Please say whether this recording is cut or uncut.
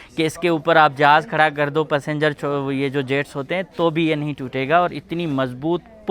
uncut